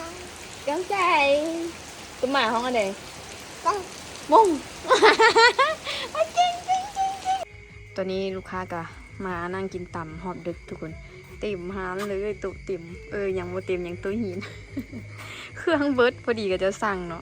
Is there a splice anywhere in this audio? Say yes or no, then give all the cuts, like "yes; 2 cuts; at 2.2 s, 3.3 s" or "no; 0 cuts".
yes; 1 cut; at 7.4 s